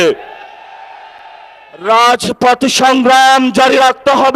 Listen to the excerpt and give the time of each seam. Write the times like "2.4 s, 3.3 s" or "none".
none